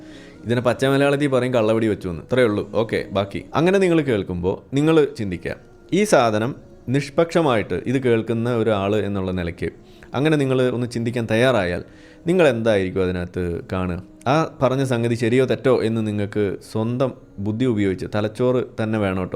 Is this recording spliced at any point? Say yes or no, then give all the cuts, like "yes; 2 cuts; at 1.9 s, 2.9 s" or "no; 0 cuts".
yes; 1 cut; at 3.4 s